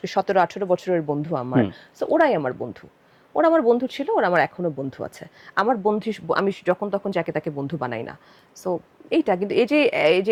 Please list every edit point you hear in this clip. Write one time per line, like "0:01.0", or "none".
none

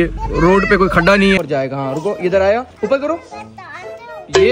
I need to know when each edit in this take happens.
0:01.4

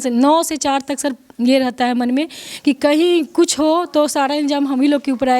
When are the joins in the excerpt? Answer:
none

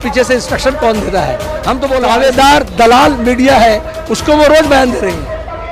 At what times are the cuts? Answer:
0:02.0

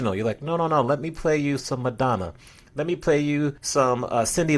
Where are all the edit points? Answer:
0:03.6

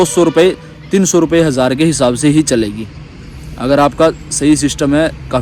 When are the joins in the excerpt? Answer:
none

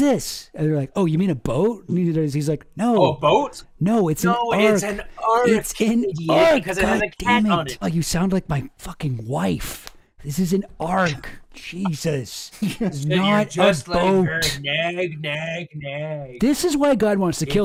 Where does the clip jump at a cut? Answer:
none

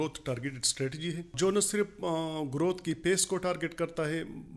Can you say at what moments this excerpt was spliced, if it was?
0:01.3

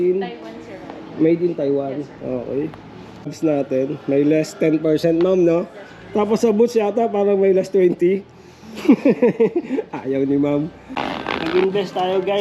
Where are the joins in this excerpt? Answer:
0:03.3
0:10.9

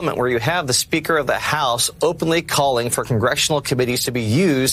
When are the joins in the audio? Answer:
none

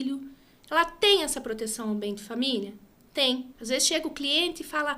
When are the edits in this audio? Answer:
0:03.5

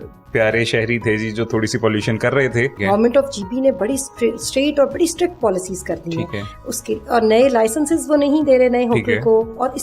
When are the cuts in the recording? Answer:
0:02.8

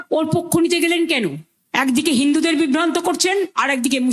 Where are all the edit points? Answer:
none

